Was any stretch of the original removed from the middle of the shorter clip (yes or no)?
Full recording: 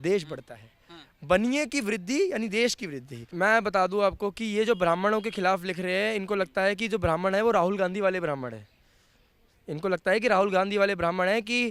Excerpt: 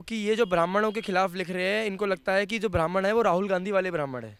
no